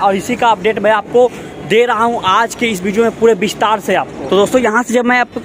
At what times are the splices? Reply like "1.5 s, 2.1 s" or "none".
none